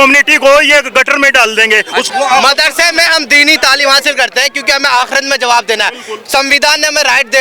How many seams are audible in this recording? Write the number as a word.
one